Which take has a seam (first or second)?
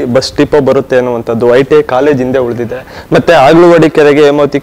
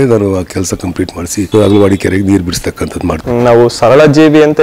second